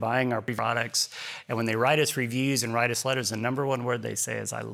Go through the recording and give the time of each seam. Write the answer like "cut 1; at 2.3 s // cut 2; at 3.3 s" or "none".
none